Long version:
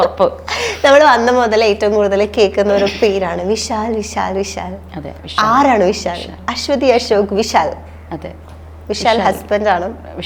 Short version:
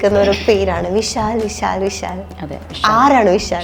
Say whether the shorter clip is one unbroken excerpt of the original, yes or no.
yes